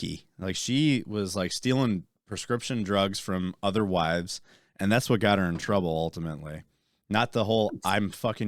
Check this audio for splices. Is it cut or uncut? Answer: uncut